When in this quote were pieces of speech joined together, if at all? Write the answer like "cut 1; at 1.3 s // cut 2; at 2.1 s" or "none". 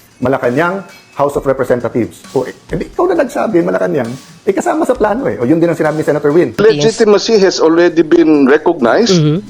cut 1; at 6.6 s // cut 2; at 8.4 s